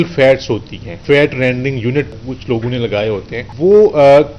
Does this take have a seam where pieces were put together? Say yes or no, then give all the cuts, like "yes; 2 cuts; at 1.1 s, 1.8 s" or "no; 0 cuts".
yes; 3 cuts; at 1.0 s, 2.2 s, 3.4 s